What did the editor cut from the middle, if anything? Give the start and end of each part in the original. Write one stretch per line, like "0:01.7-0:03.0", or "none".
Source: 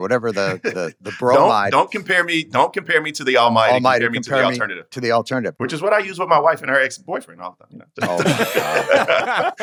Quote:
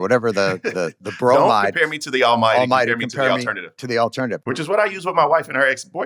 0:01.7-0:02.8